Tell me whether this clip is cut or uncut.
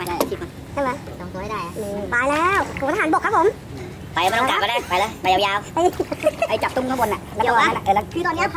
uncut